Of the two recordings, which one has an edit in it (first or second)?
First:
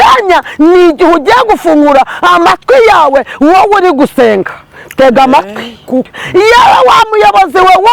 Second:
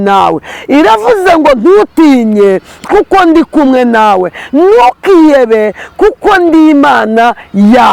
first